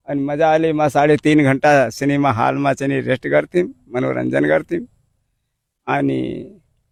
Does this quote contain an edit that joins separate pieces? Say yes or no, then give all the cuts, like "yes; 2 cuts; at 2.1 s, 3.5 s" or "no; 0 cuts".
no; 0 cuts